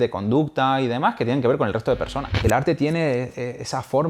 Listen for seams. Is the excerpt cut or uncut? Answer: cut